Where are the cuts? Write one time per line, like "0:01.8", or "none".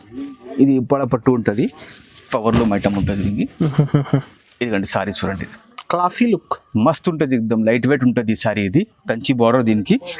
none

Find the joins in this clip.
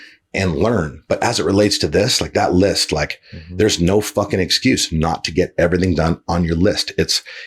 none

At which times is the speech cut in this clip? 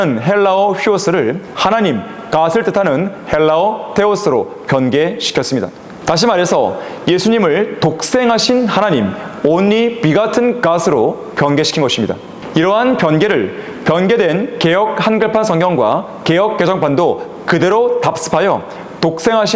0:01.5
0:05.9
0:12.3

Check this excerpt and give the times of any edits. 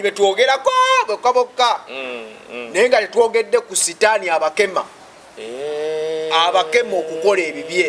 none

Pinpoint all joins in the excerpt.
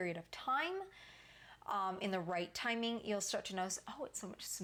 none

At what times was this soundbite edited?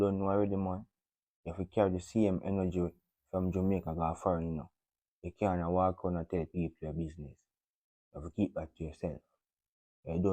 none

